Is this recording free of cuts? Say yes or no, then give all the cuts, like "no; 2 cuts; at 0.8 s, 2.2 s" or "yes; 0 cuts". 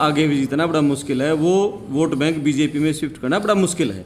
yes; 0 cuts